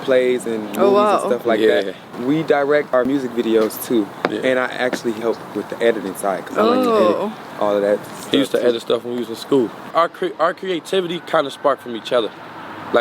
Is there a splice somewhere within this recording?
yes; 4 cuts; at 2.0 s, 3.0 s, 5.2 s, 9.9 s

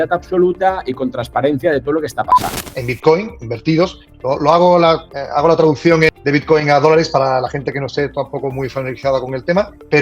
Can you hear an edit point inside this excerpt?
yes; 1 cut; at 2.6 s

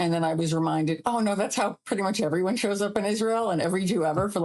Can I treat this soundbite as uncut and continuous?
yes; 0 cuts

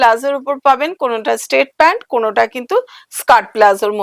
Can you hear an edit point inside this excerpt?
no; 0 cuts

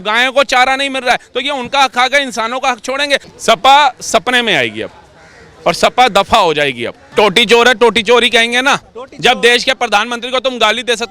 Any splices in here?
yes; 2 cuts; at 3.3 s, 7.0 s

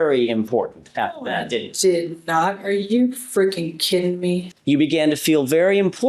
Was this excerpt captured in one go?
no; 1 cut; at 4.5 s

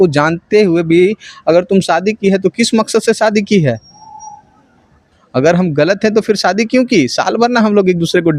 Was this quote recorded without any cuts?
yes; 0 cuts

